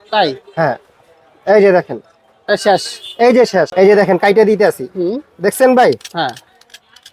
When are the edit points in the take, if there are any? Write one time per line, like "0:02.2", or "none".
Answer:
0:03.7